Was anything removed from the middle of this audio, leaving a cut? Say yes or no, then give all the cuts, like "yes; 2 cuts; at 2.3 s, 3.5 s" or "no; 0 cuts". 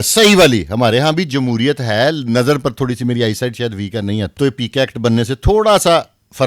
yes; 1 cut; at 4.3 s